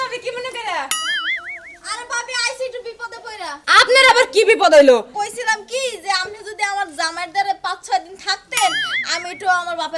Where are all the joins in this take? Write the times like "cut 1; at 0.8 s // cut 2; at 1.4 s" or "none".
cut 1; at 5.2 s

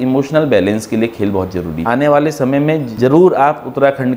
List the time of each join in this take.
cut 1; at 1.8 s // cut 2; at 2.9 s

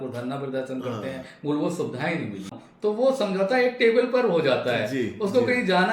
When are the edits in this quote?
cut 1; at 2.6 s

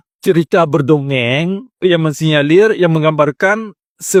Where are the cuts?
none

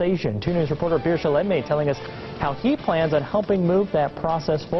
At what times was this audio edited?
cut 1; at 1.2 s // cut 2; at 3.8 s

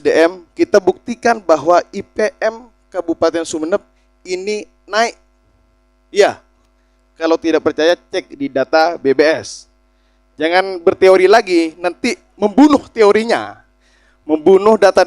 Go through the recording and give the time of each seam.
none

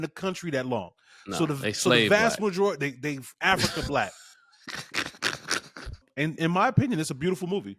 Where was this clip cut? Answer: cut 1; at 6.0 s

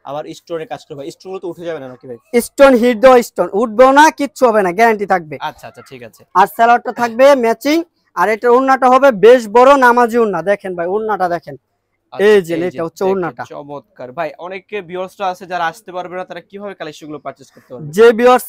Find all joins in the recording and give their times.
none

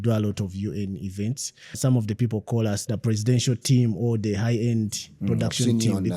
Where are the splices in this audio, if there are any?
cut 1; at 1.7 s // cut 2; at 2.8 s

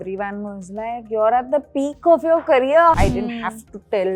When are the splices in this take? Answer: cut 1; at 3.0 s

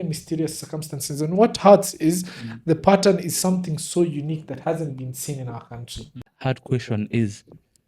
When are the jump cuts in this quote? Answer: cut 1; at 6.3 s

